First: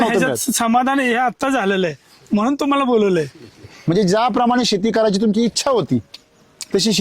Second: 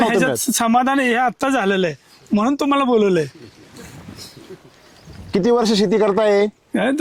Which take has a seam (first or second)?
first